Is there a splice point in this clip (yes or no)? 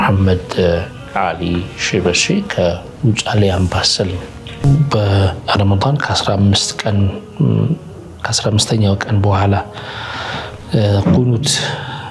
yes